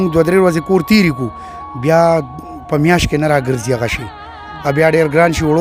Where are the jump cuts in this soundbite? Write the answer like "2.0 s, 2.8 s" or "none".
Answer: none